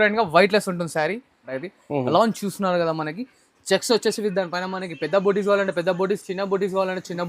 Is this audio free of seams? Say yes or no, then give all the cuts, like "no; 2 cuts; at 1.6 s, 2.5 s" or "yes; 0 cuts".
no; 1 cut; at 1.5 s